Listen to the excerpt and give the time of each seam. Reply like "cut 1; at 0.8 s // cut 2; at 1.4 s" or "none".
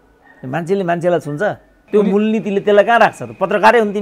cut 1; at 1.7 s